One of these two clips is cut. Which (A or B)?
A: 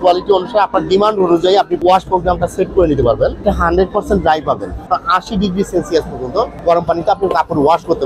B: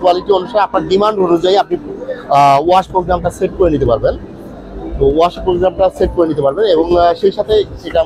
A